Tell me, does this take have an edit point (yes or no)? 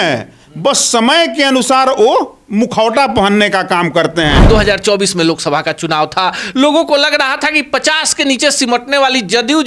yes